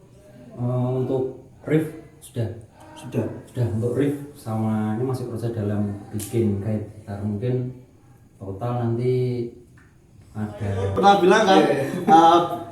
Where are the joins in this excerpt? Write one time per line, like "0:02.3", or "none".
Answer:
0:11.0